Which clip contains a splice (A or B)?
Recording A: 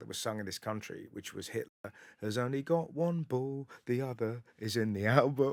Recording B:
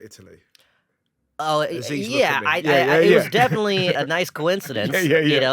B